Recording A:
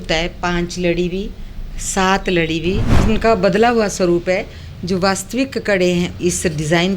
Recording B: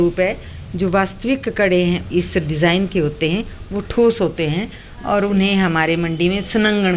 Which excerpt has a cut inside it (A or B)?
A